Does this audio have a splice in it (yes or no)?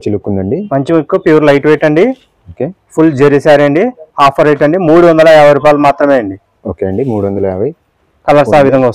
no